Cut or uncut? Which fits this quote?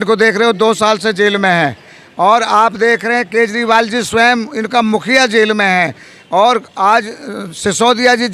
uncut